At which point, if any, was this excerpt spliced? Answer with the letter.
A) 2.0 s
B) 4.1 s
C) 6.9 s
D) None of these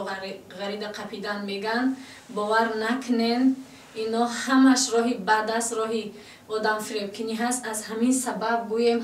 D